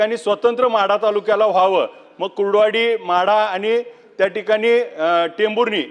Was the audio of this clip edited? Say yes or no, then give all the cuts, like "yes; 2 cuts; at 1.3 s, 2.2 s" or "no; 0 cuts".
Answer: no; 0 cuts